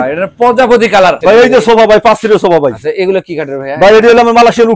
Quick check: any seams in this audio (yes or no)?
yes